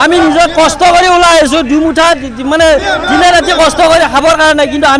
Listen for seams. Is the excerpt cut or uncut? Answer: uncut